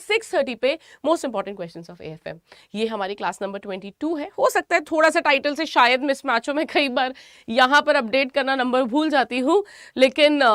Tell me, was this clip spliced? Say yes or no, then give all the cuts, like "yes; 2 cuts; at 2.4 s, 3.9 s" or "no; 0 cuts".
no; 0 cuts